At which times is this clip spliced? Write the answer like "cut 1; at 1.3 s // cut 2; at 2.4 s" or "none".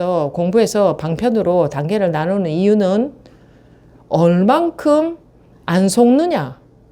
none